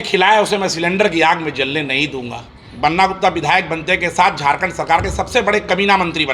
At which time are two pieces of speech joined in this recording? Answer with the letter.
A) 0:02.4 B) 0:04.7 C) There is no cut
A